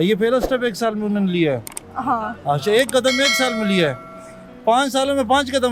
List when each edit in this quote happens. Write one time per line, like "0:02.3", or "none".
none